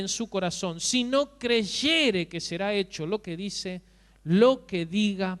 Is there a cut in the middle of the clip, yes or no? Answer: no